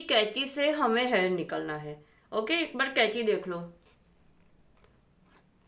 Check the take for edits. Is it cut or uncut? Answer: uncut